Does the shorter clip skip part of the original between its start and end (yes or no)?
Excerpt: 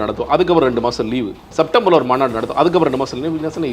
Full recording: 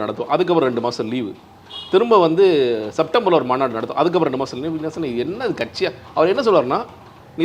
yes